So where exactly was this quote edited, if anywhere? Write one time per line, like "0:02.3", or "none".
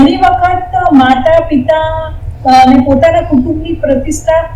none